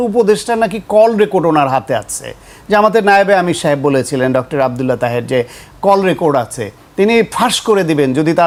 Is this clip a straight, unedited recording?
yes; 0 cuts

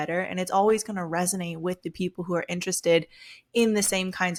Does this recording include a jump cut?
no; 0 cuts

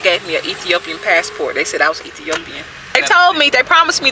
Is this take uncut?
no; 1 cut; at 3.0 s

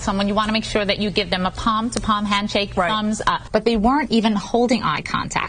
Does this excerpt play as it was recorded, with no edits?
no; 1 cut; at 3.4 s

